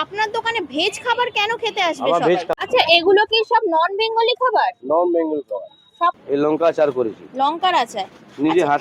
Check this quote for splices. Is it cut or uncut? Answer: cut